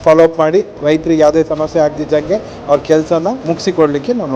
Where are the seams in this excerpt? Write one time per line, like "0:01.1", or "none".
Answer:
none